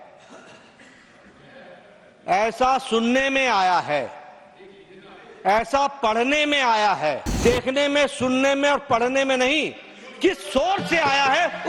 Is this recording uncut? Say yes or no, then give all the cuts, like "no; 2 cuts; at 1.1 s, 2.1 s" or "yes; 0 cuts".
no; 1 cut; at 7.4 s